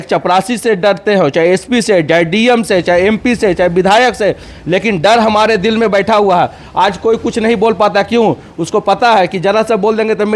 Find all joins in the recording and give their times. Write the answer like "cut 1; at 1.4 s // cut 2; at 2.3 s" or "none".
none